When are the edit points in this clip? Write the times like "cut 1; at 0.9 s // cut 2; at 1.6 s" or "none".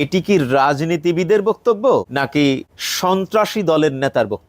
cut 1; at 2.3 s